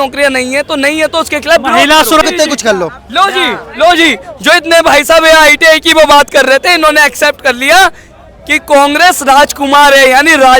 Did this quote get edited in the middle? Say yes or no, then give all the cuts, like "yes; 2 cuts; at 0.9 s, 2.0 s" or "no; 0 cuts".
yes; 1 cut; at 2.2 s